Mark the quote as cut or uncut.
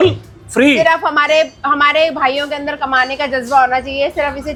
uncut